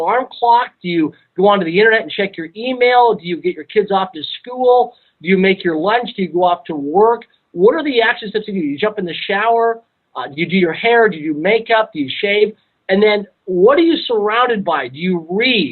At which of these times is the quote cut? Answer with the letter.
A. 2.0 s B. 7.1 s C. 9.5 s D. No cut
B